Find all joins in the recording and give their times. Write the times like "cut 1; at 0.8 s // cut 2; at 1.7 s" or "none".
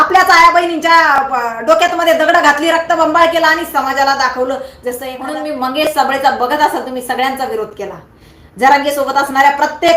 cut 1; at 5.3 s